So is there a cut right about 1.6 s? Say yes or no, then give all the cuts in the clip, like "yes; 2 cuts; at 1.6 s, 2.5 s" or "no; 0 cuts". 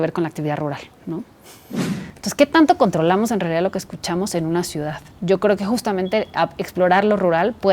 yes; 1 cut; at 1.6 s